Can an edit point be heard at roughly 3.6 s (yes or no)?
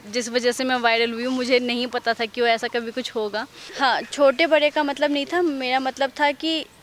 yes